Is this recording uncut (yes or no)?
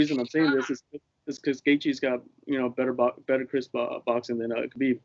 yes